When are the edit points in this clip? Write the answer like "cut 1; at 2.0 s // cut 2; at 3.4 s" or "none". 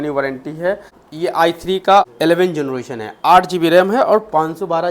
cut 1; at 1.0 s // cut 2; at 2.1 s